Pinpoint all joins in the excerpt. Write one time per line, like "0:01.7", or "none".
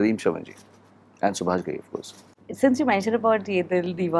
none